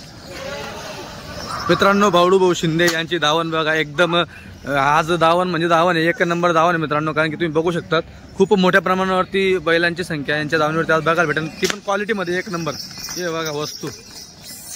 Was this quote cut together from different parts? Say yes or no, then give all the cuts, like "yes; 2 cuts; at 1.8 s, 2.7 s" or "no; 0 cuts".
no; 0 cuts